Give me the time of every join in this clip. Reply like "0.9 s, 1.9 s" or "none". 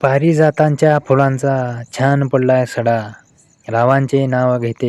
none